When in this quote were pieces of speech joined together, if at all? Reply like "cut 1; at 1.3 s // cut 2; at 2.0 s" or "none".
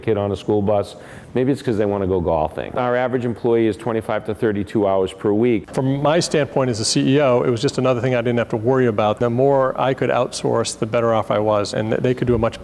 cut 1; at 2.7 s // cut 2; at 5.7 s // cut 3; at 9.2 s // cut 4; at 11.7 s